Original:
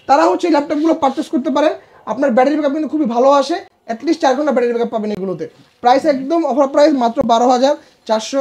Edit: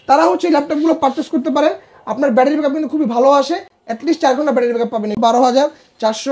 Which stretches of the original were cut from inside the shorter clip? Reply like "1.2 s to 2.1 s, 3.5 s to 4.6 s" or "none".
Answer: 5.2 s to 7.3 s